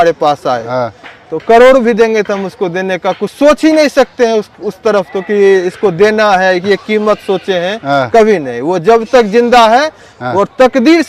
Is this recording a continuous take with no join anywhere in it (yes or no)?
yes